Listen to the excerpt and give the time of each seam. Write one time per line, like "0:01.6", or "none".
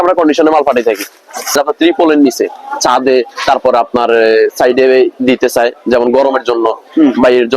0:01.5

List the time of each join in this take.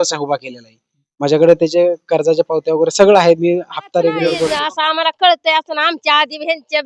0:04.6

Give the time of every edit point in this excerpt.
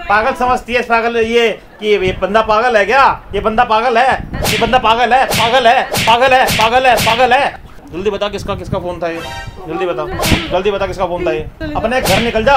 0:07.6
0:11.6

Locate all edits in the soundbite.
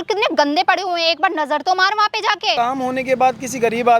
0:02.5

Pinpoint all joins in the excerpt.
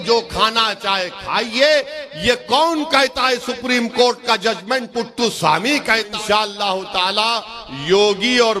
0:06.1

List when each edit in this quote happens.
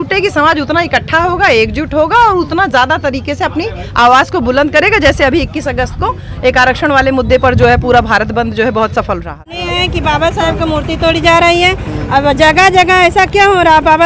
0:09.7

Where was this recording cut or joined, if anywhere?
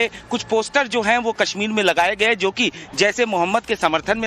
0:01.2

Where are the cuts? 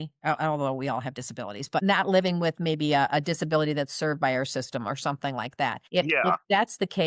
0:01.8
0:05.8

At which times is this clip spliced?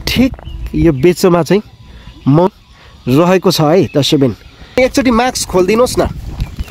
0:04.8

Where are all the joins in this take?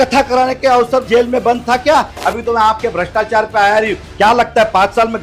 0:01.0
0:02.2

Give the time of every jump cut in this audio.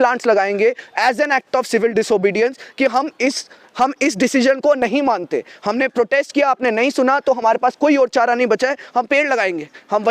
none

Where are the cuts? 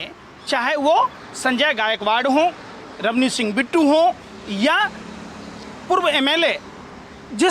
none

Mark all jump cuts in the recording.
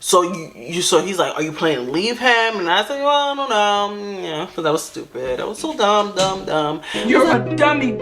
0:06.9

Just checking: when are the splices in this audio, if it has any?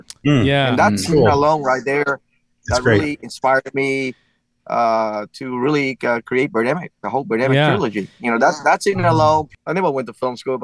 0:09.5

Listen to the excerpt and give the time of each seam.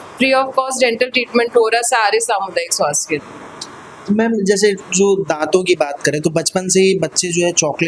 none

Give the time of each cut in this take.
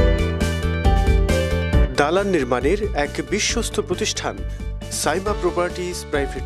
none

